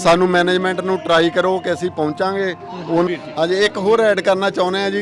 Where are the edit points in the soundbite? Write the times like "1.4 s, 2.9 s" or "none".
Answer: 3.1 s